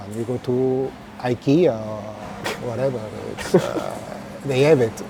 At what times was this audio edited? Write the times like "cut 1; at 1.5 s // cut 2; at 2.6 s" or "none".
none